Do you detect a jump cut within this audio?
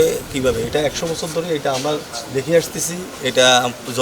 no; 0 cuts

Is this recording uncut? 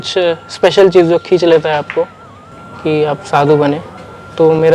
yes; 0 cuts

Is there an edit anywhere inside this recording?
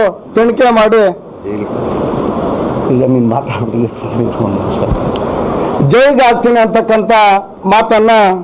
no; 0 cuts

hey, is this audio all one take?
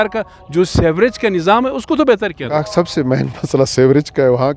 no; 1 cut; at 2.5 s

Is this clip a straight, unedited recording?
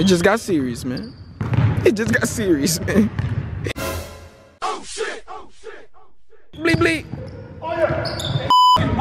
no; 2 cuts; at 3.7 s, 6.5 s

